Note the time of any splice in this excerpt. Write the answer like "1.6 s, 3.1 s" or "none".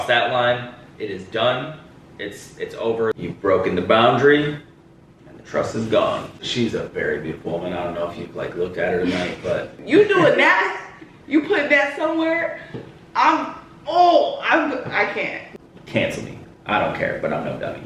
3.2 s, 6.5 s, 9.8 s, 15.4 s